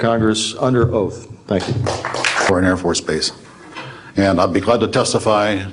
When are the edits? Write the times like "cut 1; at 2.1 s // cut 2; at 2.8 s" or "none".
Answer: cut 1; at 2.5 s